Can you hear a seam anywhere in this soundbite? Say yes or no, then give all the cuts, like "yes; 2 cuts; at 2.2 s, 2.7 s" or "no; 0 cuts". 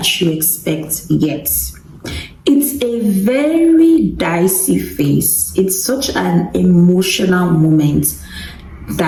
no; 0 cuts